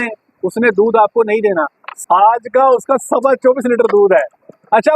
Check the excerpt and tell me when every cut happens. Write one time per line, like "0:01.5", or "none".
0:01.8